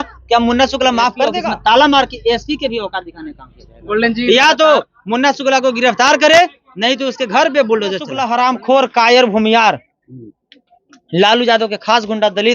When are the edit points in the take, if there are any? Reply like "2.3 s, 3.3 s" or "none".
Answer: 1.4 s, 8.1 s